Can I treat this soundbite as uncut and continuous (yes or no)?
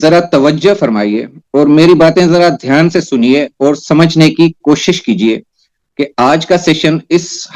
yes